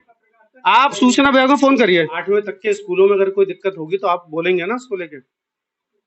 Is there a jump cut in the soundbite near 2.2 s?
yes; 1 cut; at 2.2 s

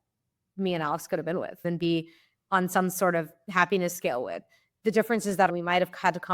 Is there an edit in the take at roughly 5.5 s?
yes; 2 cuts; at 1.6 s, 5.5 s

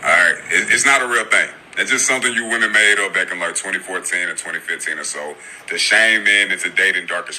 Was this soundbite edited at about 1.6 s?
yes; 1 cut; at 1.6 s

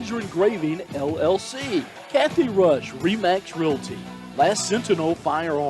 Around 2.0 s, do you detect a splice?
yes; 1 cut; at 2.0 s

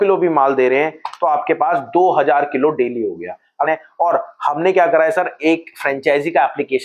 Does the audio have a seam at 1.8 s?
no; 1 cut; at 3.7 s

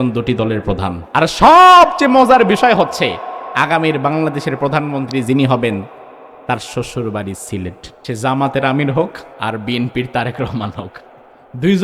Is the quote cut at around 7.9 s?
yes; 3 cuts; at 1.0 s, 7.9 s, 9.3 s

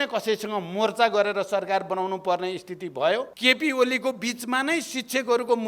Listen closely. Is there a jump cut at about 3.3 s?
yes; 1 cut; at 3.3 s

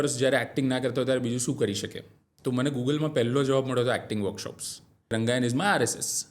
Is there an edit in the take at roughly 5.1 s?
yes; 1 cut; at 5.1 s

